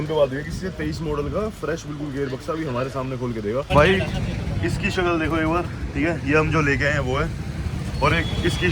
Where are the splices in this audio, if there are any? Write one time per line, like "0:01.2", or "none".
0:03.7

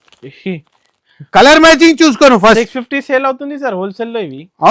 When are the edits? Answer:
none

